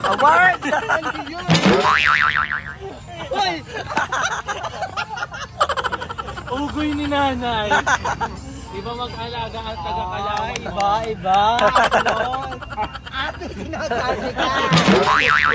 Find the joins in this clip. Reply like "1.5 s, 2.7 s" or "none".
none

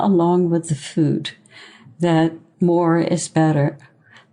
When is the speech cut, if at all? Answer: 2.5 s

